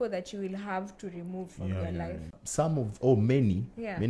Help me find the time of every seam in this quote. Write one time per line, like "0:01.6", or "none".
0:02.4